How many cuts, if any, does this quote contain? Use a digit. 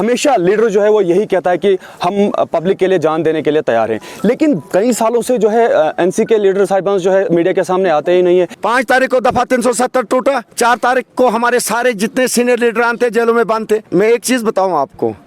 2